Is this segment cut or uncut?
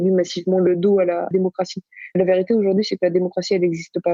uncut